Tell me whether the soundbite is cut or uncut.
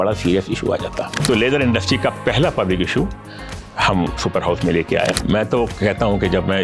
cut